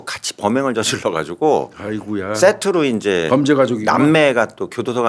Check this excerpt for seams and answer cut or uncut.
uncut